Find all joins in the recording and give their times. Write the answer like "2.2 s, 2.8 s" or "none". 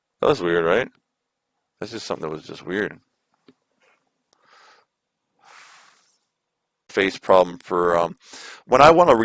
6.9 s